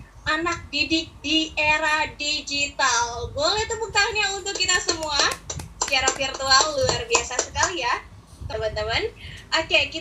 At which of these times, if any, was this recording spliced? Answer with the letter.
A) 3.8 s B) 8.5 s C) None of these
B